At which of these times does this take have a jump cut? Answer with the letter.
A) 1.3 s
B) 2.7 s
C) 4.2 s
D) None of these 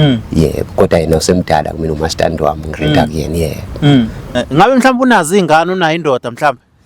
C